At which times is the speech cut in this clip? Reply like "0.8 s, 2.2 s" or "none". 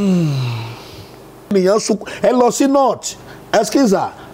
1.5 s